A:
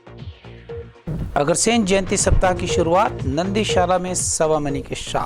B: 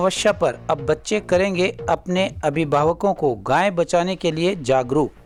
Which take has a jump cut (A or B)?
A